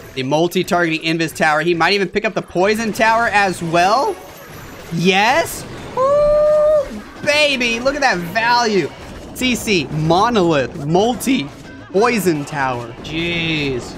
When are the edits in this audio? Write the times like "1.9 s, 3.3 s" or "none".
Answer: 13.0 s